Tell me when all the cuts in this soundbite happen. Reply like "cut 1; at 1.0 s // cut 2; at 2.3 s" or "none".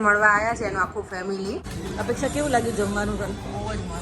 cut 1; at 1.7 s

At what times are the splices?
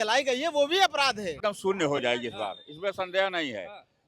cut 1; at 1.4 s

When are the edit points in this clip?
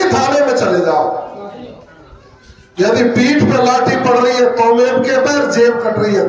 none

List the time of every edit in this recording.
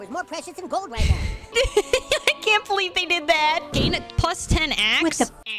cut 1; at 1.5 s // cut 2; at 3.7 s

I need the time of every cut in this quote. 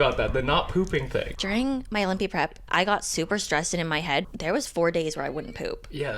cut 1; at 1.3 s // cut 2; at 4.3 s

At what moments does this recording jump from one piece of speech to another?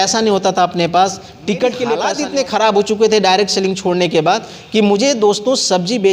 cut 1; at 2.2 s

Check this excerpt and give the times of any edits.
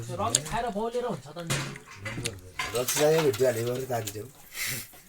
cut 1; at 2.7 s

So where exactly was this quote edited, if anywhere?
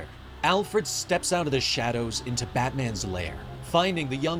none

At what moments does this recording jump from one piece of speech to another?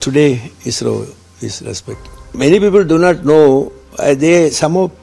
cut 1; at 2.4 s

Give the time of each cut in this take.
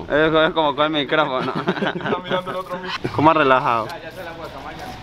cut 1; at 2.9 s

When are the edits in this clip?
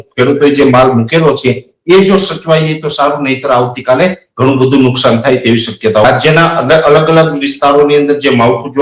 cut 1; at 6.0 s

